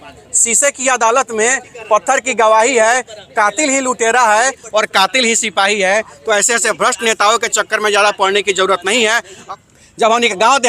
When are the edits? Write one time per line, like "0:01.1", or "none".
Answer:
0:09.3